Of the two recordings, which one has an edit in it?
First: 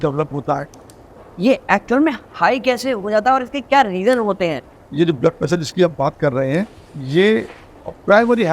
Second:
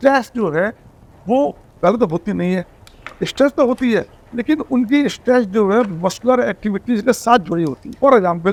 first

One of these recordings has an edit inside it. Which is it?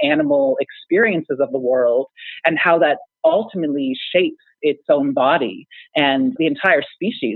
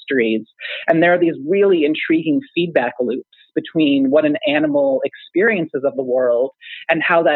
first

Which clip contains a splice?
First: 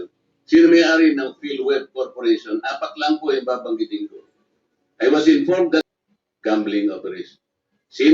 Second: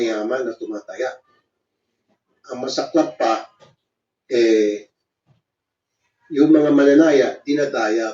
first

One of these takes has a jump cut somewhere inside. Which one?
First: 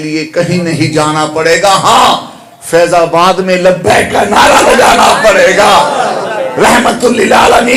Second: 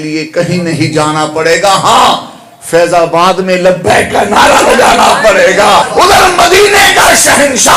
second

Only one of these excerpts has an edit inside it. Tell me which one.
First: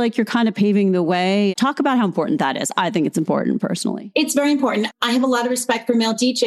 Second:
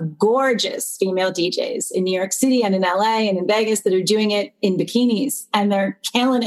first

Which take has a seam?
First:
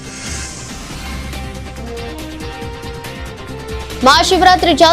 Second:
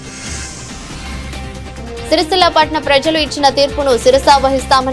second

